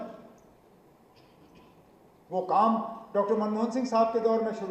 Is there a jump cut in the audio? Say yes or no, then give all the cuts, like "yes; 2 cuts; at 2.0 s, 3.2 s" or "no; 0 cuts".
no; 0 cuts